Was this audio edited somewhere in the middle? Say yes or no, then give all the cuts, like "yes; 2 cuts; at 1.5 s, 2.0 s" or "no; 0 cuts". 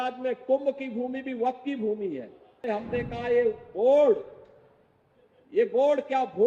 yes; 1 cut; at 2.6 s